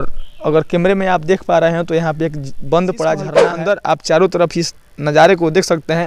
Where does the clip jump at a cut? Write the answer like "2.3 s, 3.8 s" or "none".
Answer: 3.5 s